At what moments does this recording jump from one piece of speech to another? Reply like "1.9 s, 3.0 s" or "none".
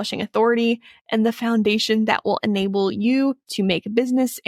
none

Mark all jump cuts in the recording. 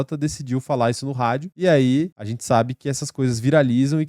1.5 s, 2.3 s

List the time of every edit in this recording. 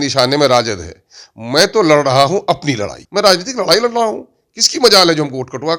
2.9 s

